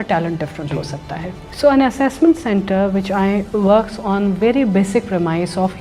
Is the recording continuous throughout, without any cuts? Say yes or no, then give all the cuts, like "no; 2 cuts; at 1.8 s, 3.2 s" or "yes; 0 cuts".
no; 2 cuts; at 1.4 s, 3.5 s